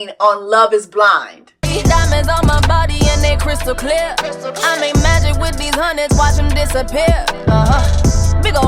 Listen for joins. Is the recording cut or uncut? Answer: cut